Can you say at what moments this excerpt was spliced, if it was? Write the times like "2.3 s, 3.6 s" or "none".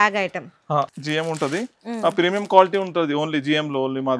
1.0 s